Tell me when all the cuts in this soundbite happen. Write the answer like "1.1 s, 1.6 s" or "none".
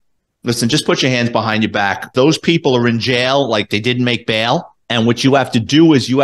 2.1 s, 4.8 s